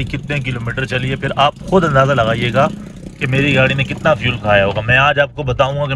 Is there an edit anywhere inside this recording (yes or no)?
no